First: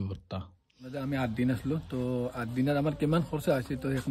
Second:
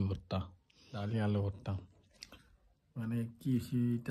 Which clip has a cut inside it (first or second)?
first